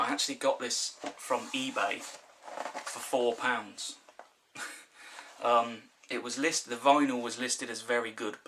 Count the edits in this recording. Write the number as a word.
one